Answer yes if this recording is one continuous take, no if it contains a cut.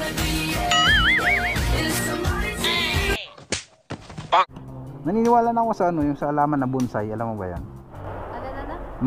no